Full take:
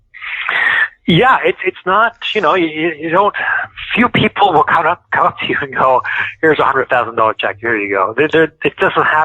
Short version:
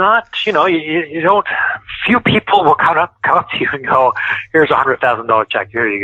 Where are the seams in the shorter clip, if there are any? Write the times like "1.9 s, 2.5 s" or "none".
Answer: none